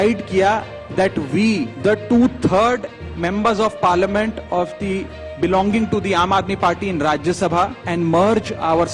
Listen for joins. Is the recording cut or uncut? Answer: cut